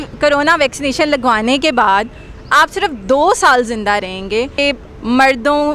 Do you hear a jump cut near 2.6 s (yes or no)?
no